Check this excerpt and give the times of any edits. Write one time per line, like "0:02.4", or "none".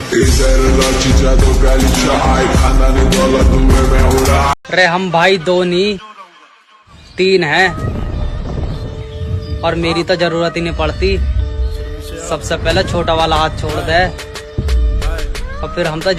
none